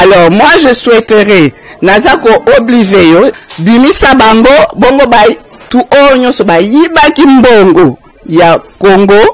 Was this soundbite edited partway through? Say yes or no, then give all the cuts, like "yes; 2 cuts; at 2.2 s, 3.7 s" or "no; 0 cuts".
yes; 1 cut; at 3.3 s